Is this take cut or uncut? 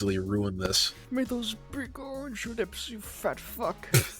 cut